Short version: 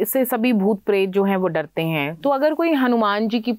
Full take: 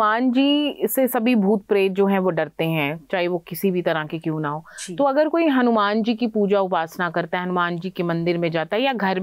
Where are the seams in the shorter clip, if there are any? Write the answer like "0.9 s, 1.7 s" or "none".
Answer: 2.1 s